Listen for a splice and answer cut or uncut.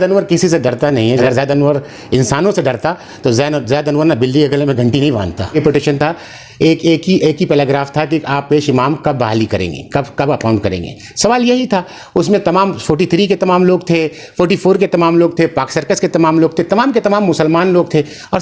cut